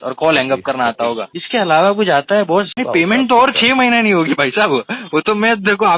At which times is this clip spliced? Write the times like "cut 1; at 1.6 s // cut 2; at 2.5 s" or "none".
cut 1; at 1.3 s // cut 2; at 2.7 s